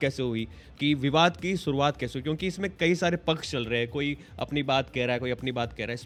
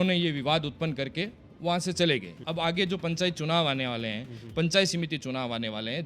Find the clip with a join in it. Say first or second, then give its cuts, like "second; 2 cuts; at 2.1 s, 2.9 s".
second; 1 cut; at 2.4 s